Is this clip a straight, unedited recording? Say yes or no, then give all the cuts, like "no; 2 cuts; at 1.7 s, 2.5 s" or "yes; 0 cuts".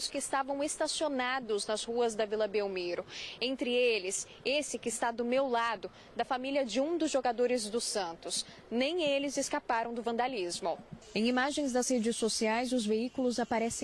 yes; 0 cuts